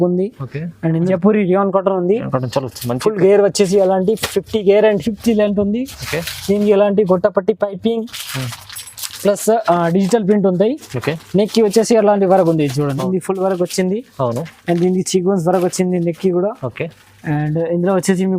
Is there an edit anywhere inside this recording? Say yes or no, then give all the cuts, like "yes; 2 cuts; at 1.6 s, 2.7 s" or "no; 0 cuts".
yes; 2 cuts; at 1.1 s, 13.0 s